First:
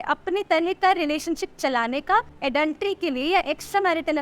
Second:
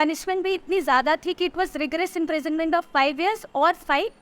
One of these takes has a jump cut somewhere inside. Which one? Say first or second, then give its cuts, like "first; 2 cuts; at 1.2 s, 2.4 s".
first; 1 cut; at 2.3 s